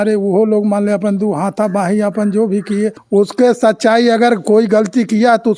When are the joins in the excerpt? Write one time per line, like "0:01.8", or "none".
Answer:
0:03.0